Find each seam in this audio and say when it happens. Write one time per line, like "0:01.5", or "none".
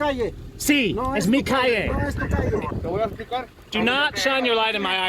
0:02.7